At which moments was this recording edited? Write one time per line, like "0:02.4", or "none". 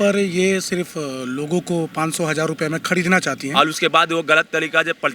0:03.4